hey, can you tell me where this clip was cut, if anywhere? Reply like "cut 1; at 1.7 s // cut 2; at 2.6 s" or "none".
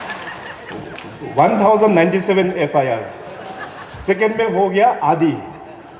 none